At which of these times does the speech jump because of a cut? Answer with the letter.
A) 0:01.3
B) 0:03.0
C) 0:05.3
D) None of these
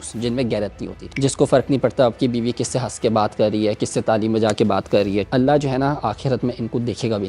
C